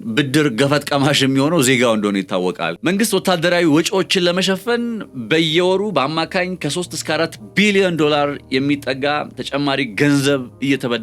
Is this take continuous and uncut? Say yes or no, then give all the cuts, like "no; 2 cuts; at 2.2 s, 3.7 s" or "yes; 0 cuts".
no; 1 cut; at 2.7 s